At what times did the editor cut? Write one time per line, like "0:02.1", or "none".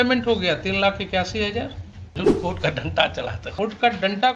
0:02.2
0:03.4